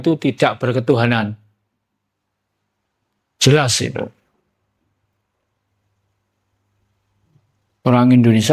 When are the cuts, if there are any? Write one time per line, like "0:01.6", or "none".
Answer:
none